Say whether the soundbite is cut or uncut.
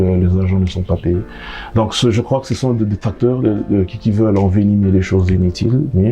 uncut